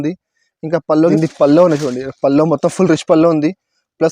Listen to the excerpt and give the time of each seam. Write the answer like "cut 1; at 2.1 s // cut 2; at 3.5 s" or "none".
cut 1; at 1.1 s